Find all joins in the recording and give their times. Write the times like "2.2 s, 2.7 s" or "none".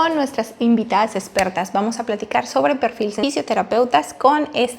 3.2 s